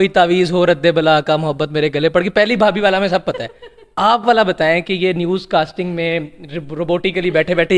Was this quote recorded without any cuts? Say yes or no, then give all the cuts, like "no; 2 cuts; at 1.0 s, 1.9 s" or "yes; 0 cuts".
yes; 0 cuts